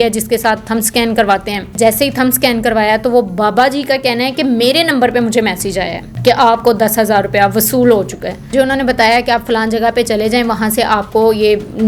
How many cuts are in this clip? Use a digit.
3